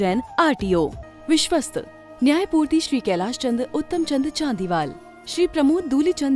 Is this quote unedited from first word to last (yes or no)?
no